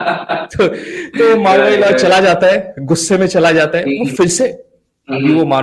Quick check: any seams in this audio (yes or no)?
no